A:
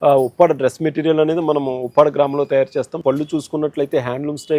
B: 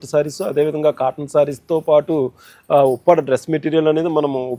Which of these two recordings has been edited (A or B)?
A